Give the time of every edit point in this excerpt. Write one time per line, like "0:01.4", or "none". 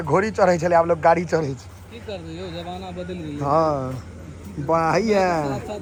none

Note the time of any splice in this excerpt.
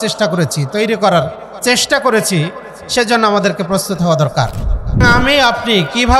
0:05.0

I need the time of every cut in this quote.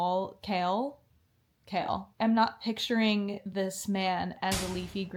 none

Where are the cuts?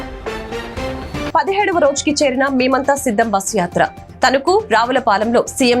0:01.3

